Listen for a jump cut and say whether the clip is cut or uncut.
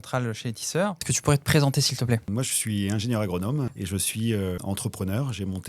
cut